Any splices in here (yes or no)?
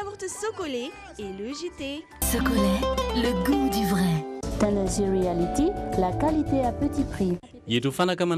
yes